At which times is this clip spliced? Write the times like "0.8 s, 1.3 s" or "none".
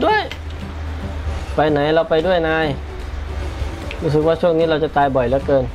none